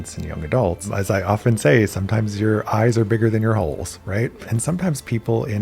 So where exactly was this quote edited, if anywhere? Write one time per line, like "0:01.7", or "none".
0:00.9
0:04.5